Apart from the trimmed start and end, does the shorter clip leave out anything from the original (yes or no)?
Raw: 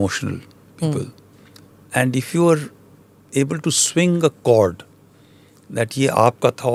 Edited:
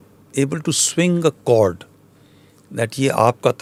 no